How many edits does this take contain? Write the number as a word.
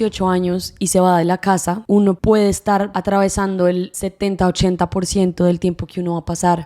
two